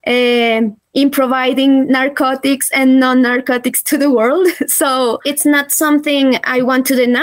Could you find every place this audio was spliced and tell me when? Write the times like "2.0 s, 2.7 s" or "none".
5.2 s